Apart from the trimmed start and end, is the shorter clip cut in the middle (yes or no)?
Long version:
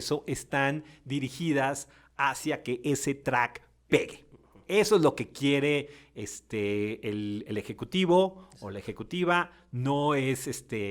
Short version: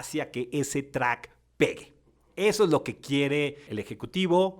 yes